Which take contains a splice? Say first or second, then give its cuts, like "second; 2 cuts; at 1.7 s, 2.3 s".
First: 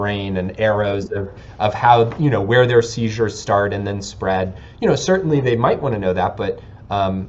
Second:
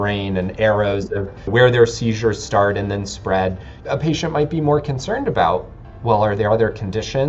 second; 2 cuts; at 1.5 s, 3.7 s